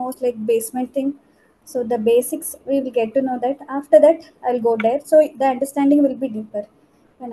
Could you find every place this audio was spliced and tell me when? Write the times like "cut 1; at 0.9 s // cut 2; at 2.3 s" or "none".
none